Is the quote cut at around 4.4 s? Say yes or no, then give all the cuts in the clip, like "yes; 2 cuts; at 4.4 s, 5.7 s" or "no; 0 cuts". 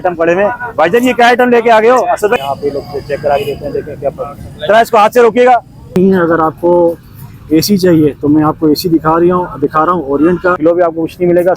no; 3 cuts; at 2.4 s, 5.9 s, 10.6 s